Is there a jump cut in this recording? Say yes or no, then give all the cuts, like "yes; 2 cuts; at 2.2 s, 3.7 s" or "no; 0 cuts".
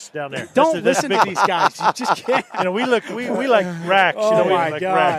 no; 0 cuts